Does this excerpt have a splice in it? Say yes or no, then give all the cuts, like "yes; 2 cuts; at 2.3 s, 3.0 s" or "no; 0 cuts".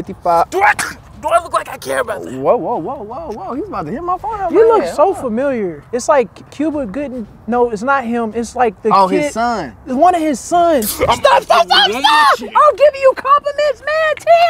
yes; 2 cuts; at 5.8 s, 12.5 s